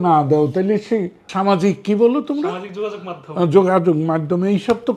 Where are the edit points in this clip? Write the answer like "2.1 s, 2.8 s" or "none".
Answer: 1.2 s